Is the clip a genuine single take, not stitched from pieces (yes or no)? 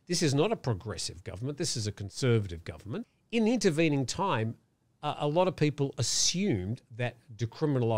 no